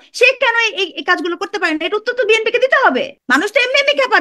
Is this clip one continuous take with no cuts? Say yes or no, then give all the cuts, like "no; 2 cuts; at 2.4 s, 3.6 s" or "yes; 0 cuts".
no; 1 cut; at 3.2 s